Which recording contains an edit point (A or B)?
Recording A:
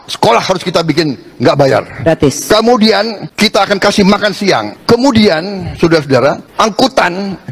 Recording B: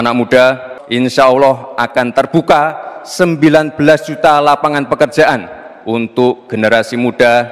A